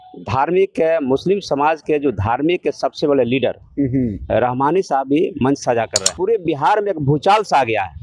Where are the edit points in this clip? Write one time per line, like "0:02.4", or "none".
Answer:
0:06.0